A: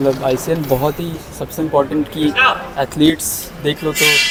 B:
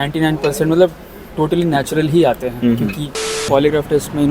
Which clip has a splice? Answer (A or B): B